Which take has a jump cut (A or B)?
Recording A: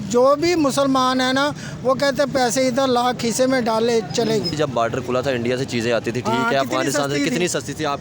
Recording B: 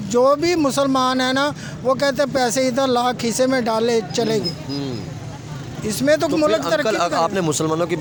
A